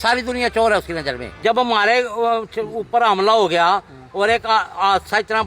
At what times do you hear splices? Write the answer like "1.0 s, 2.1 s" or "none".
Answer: 1.3 s